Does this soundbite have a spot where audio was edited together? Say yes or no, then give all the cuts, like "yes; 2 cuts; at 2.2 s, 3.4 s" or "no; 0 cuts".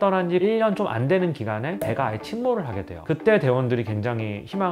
no; 0 cuts